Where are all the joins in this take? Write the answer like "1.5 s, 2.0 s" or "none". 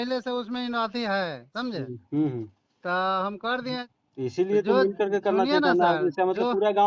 3.9 s